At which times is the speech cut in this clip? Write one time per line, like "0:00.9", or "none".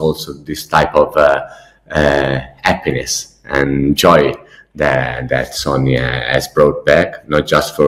none